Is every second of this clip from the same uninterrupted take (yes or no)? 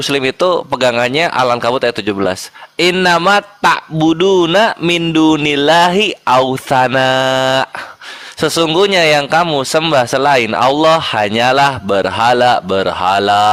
yes